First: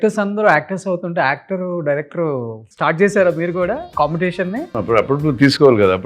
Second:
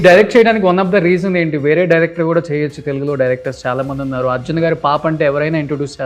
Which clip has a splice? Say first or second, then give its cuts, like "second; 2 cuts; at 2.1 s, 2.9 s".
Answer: first; 3 cuts; at 2.6 s, 3.9 s, 4.7 s